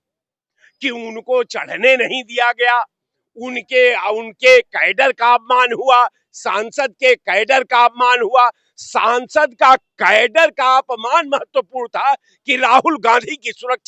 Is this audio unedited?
yes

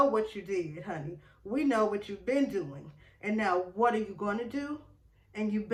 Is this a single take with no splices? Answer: yes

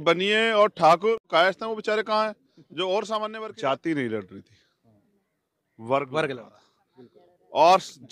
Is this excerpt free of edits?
no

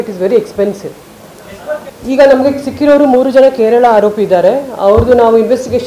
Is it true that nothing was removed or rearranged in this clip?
no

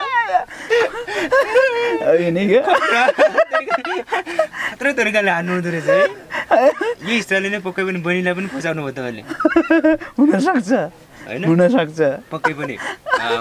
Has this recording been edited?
no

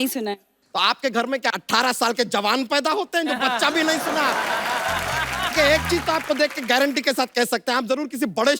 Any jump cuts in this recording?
yes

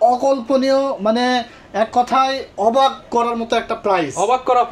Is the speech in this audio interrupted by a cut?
no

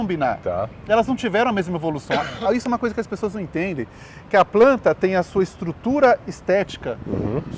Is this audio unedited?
yes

